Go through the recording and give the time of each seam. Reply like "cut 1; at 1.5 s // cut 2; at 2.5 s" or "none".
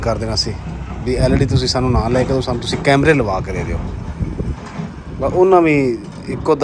none